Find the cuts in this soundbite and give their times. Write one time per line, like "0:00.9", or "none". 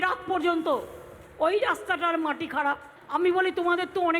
0:02.9

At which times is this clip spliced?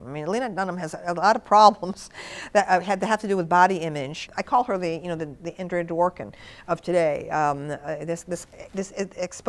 0:04.3

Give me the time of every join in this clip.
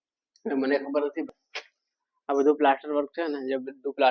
0:01.2

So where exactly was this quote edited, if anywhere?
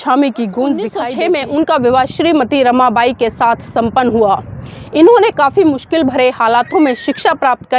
0:01.0

